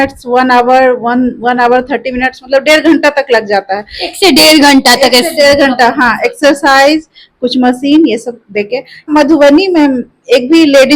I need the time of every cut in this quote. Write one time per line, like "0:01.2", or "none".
0:09.1